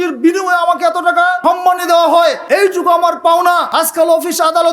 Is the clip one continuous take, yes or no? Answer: no